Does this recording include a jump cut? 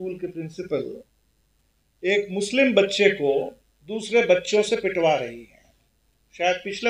no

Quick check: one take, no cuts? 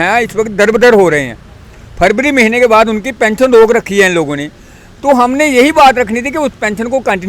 yes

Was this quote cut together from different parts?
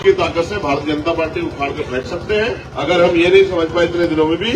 yes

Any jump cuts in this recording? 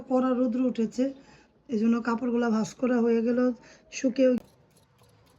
yes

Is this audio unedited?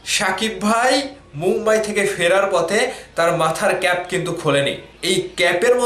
no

